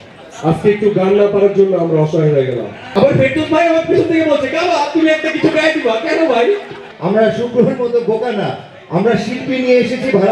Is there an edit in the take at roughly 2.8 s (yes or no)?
yes